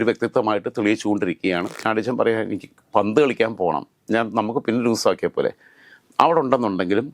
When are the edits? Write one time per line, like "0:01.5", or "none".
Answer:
0:01.8